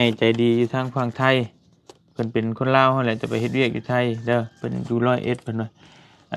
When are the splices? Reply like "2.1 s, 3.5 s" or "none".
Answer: none